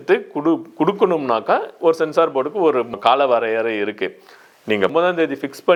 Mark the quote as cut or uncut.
uncut